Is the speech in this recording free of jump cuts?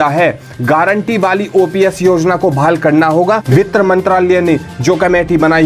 no; 1 cut; at 3.4 s

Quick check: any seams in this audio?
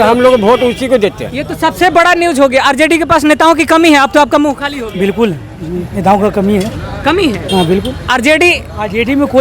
no; 0 cuts

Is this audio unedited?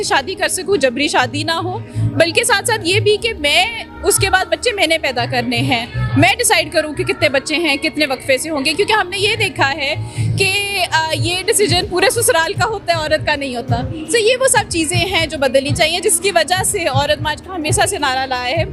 yes; 0 cuts

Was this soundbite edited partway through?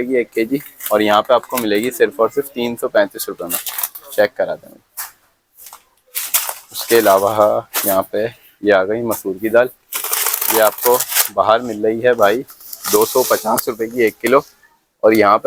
no; 0 cuts

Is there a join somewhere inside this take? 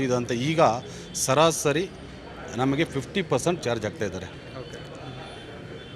no; 0 cuts

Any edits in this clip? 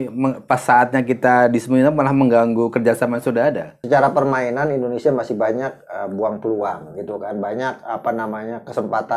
yes; 1 cut; at 3.7 s

